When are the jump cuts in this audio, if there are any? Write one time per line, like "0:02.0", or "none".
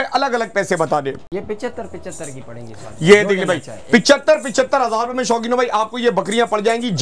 none

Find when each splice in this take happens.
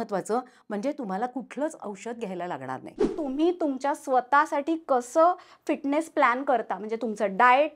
0:03.1

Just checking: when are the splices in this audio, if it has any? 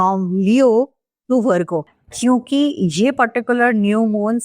0:01.9

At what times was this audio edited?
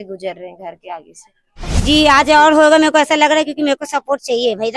0:01.7

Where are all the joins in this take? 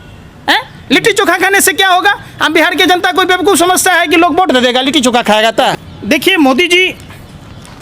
0:05.7

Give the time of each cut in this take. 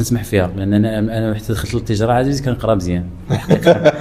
none

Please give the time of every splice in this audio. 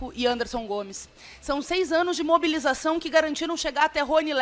none

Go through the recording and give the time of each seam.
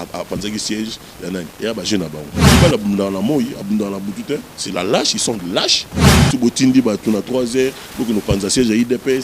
0:02.5
0:06.1

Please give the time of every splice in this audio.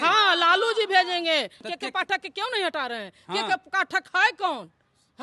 0:01.6

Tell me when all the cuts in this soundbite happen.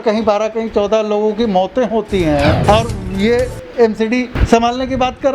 0:02.6
0:04.4

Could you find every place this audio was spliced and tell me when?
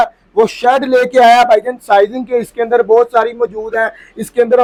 none

